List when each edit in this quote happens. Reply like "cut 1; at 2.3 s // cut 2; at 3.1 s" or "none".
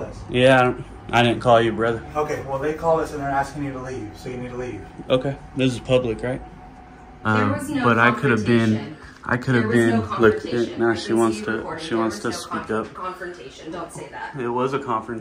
cut 1; at 7.0 s